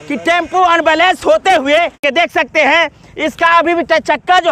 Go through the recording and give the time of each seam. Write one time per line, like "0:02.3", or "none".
0:02.0